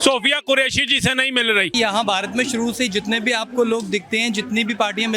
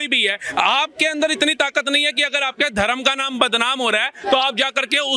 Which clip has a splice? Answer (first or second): first